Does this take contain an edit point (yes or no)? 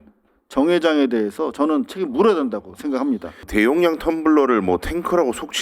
yes